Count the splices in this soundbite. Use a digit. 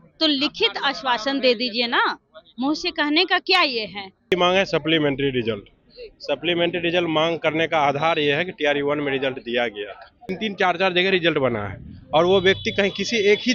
2